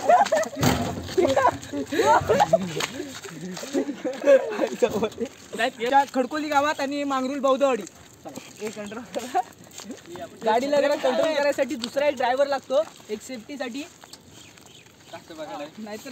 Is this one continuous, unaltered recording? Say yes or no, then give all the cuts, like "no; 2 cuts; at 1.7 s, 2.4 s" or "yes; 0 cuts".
yes; 0 cuts